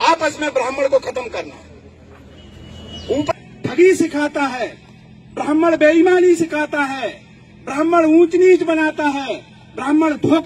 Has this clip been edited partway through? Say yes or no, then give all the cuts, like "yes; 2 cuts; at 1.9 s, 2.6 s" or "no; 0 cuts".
yes; 1 cut; at 3.3 s